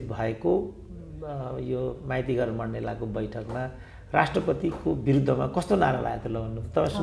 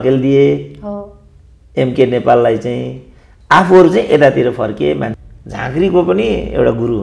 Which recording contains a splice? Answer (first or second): second